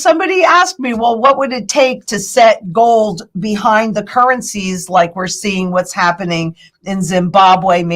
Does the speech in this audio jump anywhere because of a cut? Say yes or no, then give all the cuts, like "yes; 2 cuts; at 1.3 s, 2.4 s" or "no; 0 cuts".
no; 0 cuts